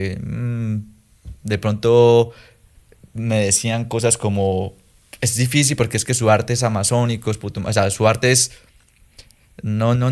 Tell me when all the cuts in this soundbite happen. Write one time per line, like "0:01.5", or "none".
none